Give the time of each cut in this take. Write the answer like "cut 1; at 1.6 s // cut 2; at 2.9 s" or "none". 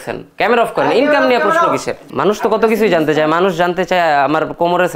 cut 1; at 2.0 s